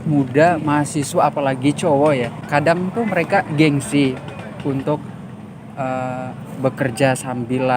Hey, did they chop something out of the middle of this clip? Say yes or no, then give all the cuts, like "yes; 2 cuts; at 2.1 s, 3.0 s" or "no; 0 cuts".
yes; 1 cut; at 2.4 s